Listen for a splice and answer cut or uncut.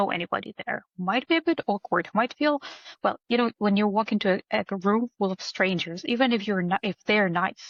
uncut